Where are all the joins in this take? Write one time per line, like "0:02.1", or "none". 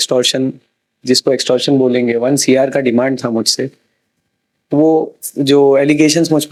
none